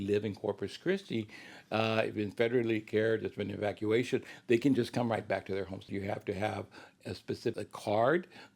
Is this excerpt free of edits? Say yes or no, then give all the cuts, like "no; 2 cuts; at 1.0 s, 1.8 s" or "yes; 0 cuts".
no; 2 cuts; at 5.9 s, 7.5 s